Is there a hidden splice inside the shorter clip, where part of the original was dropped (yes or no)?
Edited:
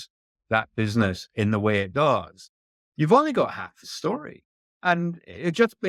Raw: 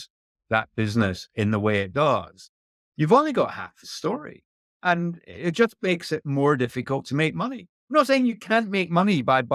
no